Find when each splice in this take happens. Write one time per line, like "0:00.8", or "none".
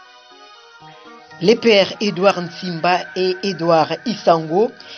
0:01.4